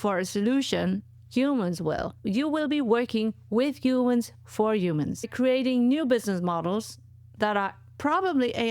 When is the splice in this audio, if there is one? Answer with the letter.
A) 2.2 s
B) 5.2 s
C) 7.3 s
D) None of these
B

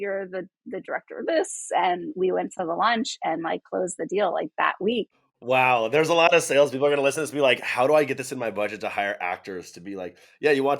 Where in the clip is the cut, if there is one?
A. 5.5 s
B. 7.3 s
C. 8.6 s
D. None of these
A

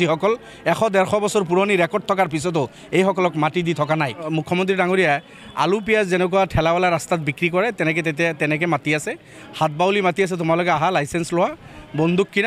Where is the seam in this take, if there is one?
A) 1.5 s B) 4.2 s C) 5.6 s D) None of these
B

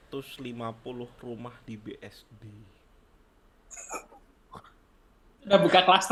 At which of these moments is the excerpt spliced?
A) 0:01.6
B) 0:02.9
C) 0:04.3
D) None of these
D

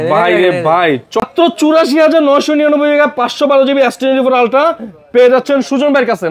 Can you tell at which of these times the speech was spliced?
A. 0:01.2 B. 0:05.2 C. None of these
A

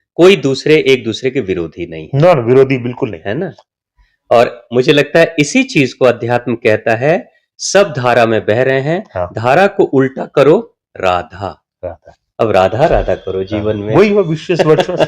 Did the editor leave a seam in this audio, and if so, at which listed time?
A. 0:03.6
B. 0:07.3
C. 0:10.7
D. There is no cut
A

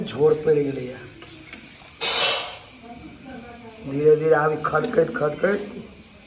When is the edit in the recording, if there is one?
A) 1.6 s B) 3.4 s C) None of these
C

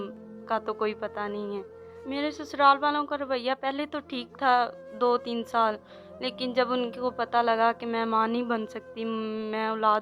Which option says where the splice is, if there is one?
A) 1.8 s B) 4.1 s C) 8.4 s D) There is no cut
A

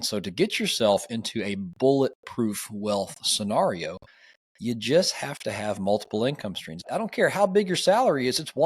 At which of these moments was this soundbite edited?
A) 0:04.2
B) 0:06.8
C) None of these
B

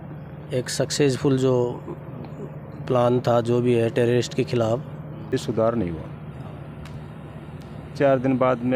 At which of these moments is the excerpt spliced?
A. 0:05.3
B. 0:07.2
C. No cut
A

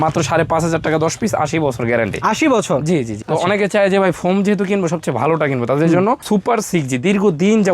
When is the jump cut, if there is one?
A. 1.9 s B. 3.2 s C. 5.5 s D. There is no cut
B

